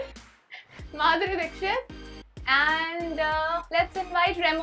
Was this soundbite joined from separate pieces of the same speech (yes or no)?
yes